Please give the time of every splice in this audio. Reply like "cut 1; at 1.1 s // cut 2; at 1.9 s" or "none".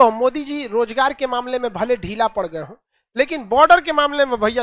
none